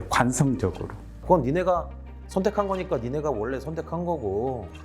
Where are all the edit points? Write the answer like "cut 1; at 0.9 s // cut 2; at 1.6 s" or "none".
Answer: cut 1; at 1.1 s